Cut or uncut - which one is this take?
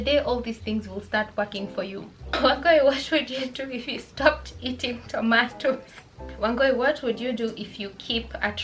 cut